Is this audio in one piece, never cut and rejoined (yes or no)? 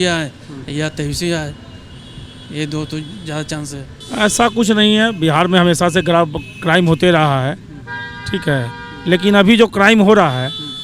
no